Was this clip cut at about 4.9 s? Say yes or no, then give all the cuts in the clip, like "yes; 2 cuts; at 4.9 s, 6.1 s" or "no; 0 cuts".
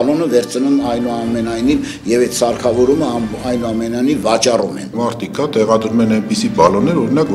yes; 1 cut; at 4.9 s